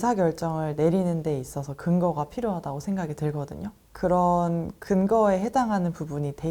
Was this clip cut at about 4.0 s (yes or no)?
no